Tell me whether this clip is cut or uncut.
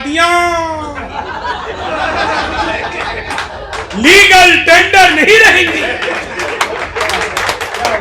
uncut